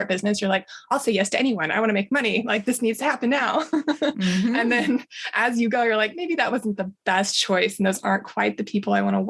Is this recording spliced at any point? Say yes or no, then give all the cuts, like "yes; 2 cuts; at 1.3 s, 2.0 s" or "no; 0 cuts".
no; 0 cuts